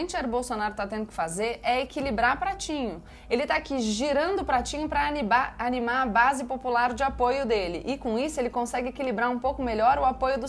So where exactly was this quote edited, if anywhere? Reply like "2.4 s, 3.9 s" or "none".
3.1 s